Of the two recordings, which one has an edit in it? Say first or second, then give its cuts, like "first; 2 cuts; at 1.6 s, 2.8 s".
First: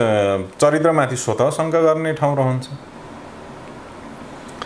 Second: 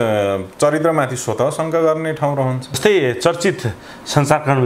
second; 1 cut; at 2.8 s